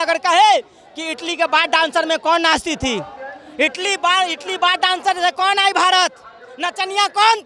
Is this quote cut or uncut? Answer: uncut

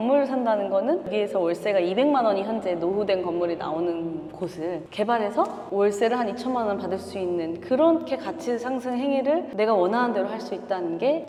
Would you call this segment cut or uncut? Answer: uncut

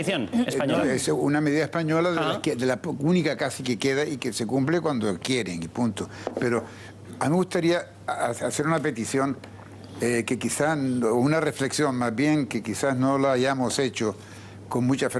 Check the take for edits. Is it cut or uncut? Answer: uncut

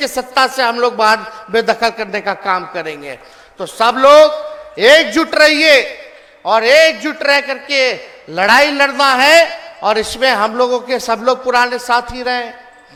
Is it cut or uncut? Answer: uncut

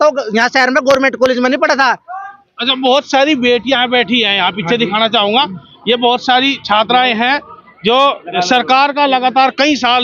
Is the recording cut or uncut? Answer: uncut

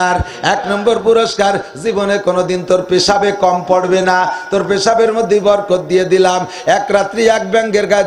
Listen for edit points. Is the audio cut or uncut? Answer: uncut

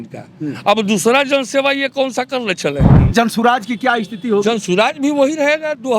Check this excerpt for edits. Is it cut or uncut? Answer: cut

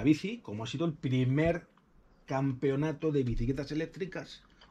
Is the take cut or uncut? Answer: uncut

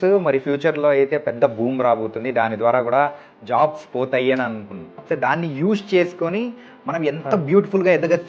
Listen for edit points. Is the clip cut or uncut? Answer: cut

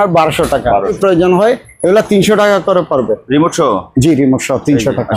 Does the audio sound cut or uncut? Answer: cut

